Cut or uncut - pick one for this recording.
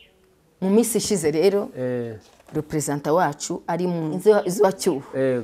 cut